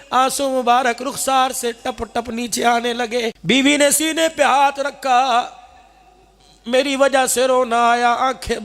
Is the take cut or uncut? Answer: cut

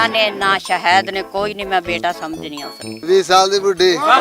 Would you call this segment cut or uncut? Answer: cut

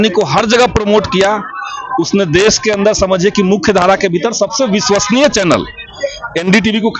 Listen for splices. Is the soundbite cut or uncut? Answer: uncut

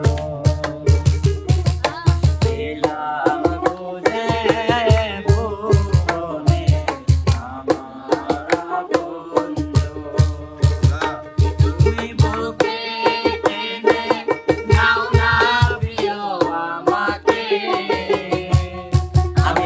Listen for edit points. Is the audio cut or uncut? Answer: uncut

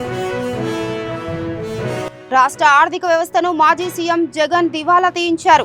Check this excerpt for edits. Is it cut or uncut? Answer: uncut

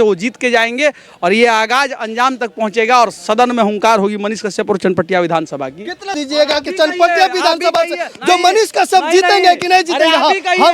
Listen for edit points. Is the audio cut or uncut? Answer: cut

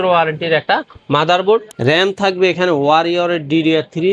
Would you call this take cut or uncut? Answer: cut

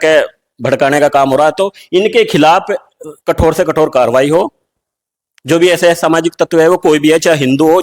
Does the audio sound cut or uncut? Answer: uncut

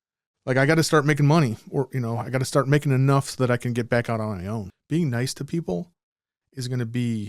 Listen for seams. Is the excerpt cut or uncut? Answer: cut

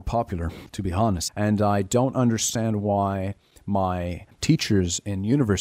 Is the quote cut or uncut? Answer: cut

